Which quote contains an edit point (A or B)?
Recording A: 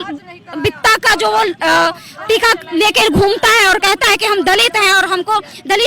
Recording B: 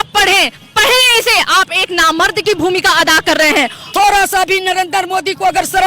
B